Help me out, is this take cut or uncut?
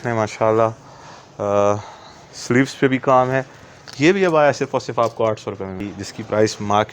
cut